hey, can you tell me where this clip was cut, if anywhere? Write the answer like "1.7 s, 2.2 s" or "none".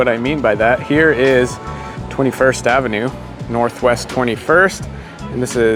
none